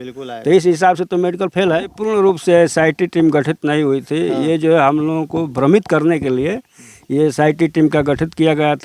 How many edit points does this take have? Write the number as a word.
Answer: one